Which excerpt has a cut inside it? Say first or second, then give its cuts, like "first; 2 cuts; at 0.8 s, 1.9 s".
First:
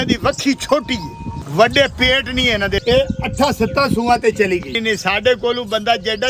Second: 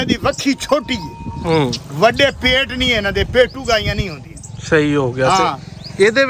first; 3 cuts; at 1.4 s, 2.8 s, 4.7 s